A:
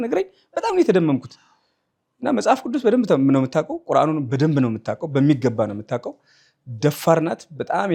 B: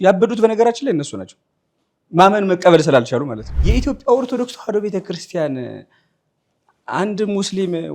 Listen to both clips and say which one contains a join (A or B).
B